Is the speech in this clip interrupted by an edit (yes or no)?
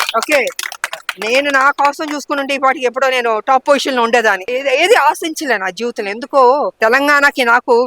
yes